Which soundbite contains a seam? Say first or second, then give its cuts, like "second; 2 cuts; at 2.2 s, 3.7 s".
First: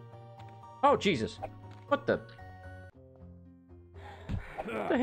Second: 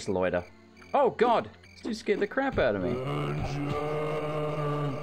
second; 1 cut; at 1.6 s